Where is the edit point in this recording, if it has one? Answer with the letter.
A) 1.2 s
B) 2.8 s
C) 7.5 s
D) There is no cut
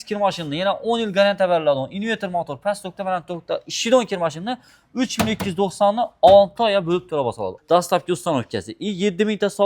C